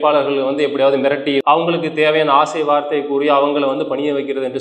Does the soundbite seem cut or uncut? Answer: cut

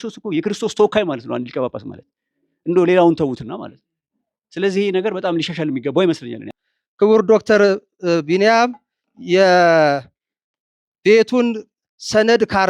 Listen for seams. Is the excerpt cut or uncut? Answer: cut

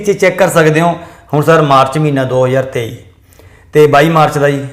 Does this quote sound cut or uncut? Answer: uncut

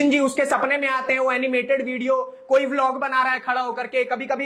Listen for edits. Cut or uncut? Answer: uncut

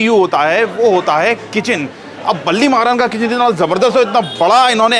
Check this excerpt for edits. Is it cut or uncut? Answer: uncut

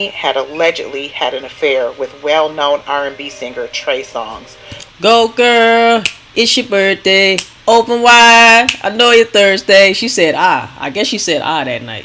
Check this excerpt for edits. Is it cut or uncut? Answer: uncut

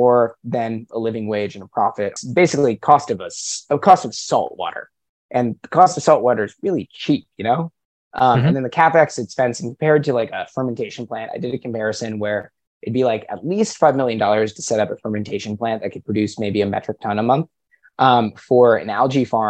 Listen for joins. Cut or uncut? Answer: cut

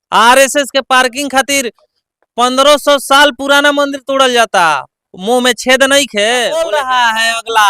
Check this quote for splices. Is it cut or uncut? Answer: cut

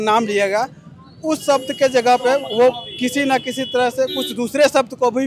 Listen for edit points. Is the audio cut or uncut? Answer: uncut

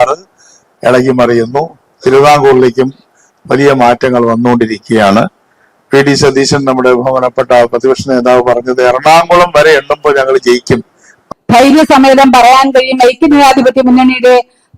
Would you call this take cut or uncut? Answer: cut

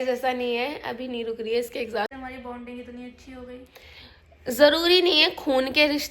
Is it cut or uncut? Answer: cut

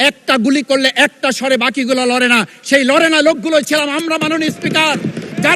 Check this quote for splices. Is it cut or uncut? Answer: uncut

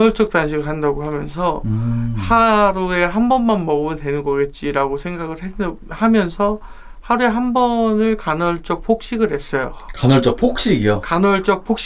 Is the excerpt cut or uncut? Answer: uncut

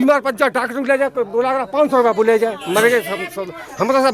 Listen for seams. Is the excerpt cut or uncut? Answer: uncut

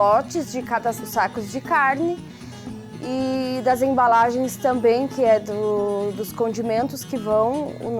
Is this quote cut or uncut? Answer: cut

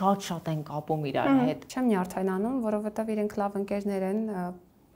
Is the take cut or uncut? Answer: cut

